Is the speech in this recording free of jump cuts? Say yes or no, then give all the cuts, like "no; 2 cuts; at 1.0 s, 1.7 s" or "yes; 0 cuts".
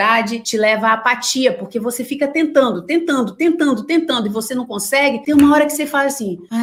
yes; 0 cuts